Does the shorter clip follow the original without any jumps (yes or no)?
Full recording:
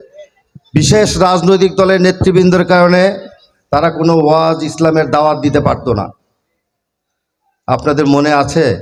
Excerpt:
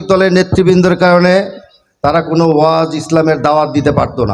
yes